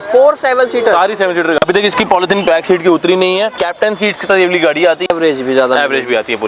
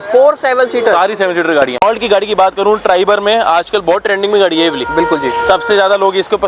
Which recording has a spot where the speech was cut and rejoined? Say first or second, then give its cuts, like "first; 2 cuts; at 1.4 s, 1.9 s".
first; 3 cuts; at 1.6 s, 3.6 s, 5.1 s